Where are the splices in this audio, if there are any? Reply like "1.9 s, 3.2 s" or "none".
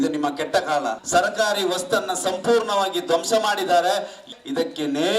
1.0 s, 4.3 s